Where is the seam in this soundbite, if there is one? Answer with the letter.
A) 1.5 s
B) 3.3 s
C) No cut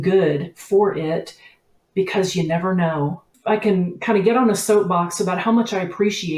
B